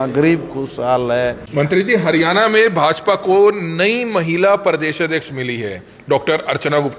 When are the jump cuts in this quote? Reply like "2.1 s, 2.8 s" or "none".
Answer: 1.4 s

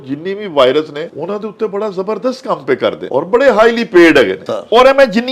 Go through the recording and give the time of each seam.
1.1 s, 3.0 s, 4.4 s

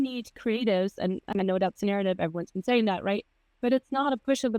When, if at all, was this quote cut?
1.3 s

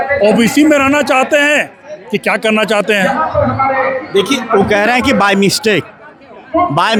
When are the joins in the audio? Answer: none

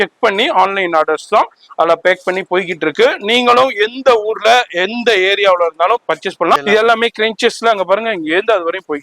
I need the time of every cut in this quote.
6.6 s

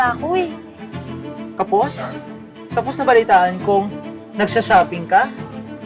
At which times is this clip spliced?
none

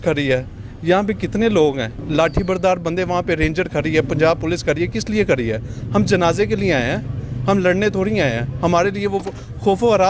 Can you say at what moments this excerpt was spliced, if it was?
1.9 s

